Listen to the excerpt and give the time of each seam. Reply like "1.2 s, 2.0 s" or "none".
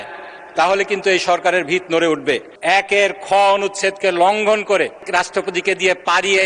2.5 s, 5.0 s